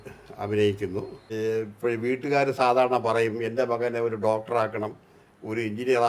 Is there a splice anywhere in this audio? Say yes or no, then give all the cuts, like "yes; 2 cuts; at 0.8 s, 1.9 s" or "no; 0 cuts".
yes; 1 cut; at 1.2 s